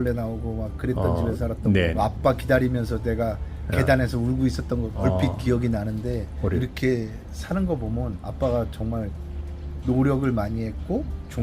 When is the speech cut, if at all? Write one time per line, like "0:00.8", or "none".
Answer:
0:01.9
0:04.9
0:06.6
0:08.2

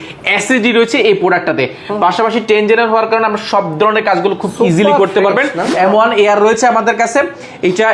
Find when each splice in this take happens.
0:05.6

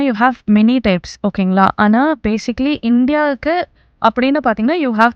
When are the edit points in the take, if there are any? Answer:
0:03.8

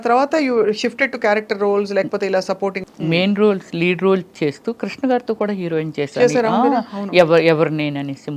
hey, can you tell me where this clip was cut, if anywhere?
0:02.8

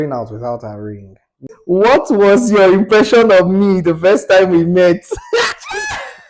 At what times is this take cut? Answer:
0:01.5

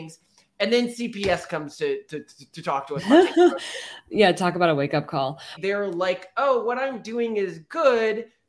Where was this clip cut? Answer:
0:05.5

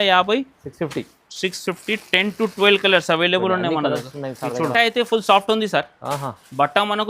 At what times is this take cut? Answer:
0:04.7

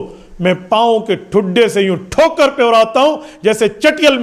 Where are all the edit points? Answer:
none

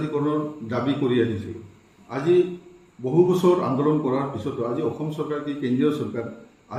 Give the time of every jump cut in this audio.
none

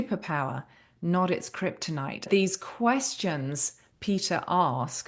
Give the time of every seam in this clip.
0:02.3

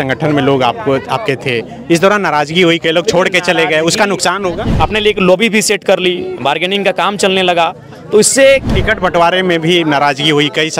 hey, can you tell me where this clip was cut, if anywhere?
0:04.6
0:08.7

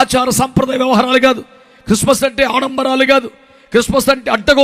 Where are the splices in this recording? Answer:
none

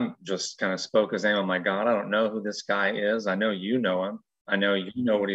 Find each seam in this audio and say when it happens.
none

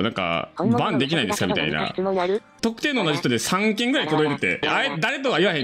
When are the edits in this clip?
none

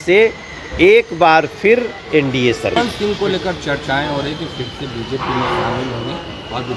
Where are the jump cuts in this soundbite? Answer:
0:02.8

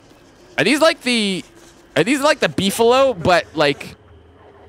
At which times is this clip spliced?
none

